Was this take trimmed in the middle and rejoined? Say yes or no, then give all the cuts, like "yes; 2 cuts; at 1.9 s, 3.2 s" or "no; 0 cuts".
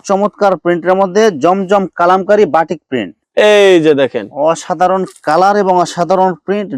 yes; 1 cut; at 3.2 s